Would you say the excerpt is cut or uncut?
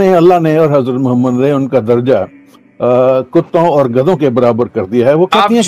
uncut